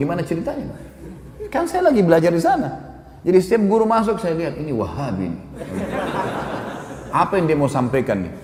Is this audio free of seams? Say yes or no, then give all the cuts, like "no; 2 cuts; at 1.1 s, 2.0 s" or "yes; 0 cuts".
yes; 0 cuts